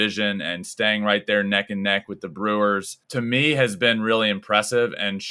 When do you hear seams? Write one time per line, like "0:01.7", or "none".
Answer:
0:03.0